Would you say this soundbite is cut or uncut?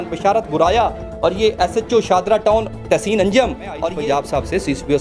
cut